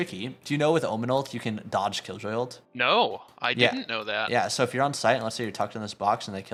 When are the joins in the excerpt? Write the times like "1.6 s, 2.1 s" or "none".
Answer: none